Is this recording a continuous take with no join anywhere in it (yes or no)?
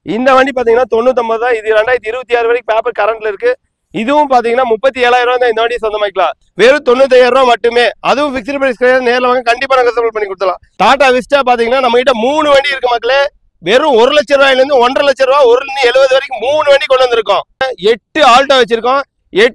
no